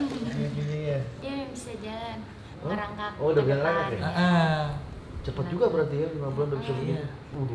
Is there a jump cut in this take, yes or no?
no